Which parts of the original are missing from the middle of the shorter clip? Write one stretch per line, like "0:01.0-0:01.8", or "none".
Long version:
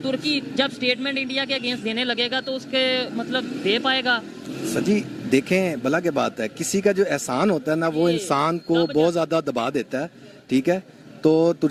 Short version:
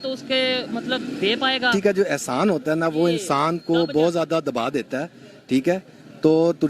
0:04.1-0:06.7